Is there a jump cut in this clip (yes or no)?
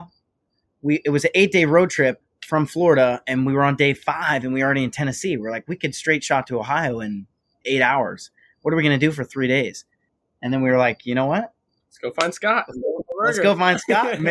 no